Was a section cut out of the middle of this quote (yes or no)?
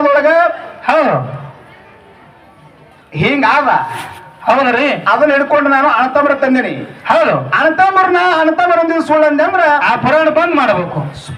no